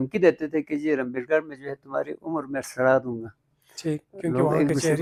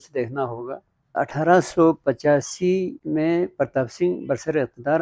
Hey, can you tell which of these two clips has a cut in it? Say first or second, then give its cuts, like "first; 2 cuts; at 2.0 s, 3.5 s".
second; 2 cuts; at 1.1 s, 3.0 s